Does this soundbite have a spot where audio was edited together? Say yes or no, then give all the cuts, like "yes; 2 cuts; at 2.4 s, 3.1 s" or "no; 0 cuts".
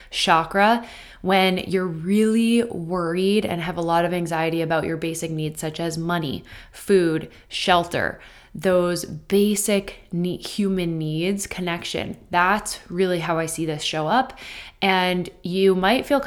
no; 0 cuts